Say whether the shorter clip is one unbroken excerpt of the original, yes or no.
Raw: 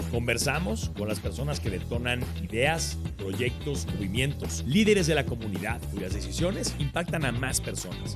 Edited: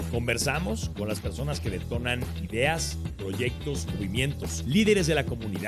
yes